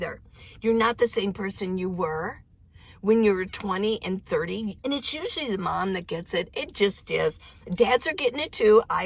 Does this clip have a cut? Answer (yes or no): yes